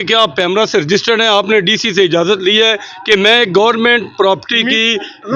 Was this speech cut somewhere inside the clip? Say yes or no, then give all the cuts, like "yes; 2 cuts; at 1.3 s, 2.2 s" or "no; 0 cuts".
no; 0 cuts